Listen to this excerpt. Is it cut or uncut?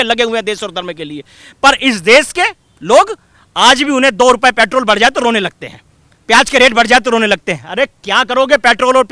uncut